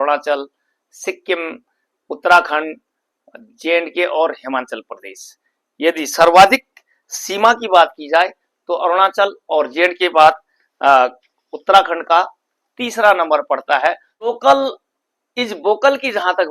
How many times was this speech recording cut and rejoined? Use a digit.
1